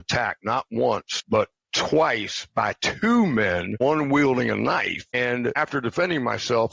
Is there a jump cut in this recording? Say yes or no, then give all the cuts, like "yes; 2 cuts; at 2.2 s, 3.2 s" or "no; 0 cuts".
yes; 3 cuts; at 1.1 s, 3.8 s, 5.5 s